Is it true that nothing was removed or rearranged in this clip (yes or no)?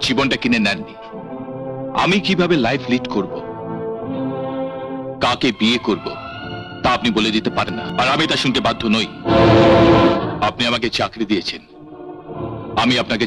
yes